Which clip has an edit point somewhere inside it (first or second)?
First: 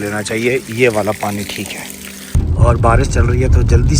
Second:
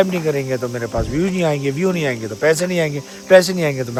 first